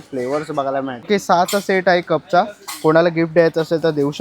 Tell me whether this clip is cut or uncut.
cut